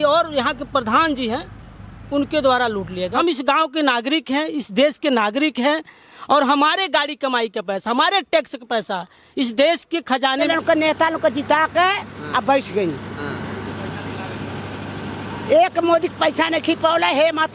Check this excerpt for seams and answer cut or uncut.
cut